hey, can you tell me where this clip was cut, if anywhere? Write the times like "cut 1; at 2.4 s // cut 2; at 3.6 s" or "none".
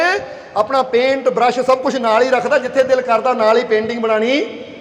none